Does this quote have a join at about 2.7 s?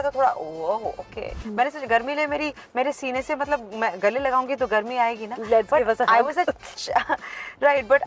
no; 1 cut; at 1.4 s

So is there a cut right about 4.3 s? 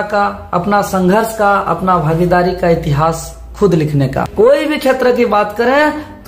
yes; 1 cut; at 4.3 s

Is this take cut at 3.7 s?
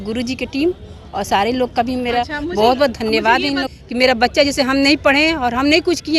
yes; 1 cut; at 3.7 s

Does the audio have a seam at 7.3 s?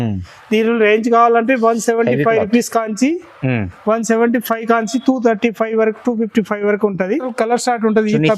yes; 1 cut; at 7.3 s

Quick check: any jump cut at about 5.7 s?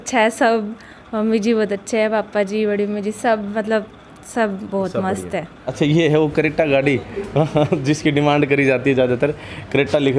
yes; 1 cut; at 5.7 s

